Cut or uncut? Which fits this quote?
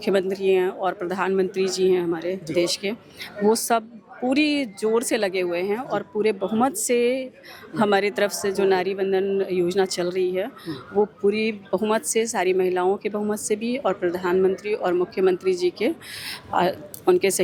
uncut